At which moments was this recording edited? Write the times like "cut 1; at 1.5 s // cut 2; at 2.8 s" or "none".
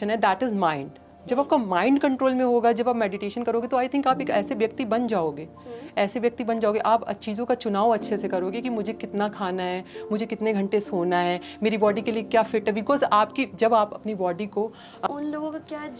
cut 1; at 15.0 s